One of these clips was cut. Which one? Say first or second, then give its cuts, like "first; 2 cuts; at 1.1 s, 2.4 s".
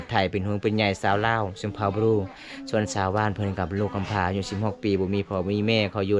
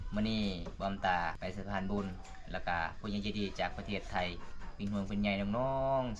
second; 1 cut; at 1.4 s